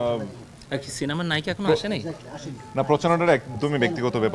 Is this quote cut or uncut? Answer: uncut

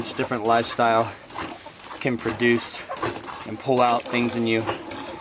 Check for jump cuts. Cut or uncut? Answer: uncut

